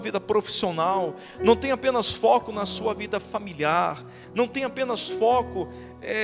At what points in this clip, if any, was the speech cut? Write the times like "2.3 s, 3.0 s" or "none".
none